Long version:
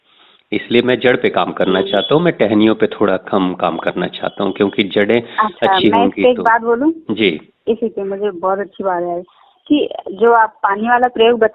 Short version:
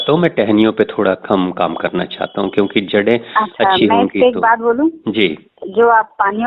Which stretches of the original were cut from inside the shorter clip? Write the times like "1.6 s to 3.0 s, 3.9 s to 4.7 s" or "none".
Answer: 7.6 s to 10.0 s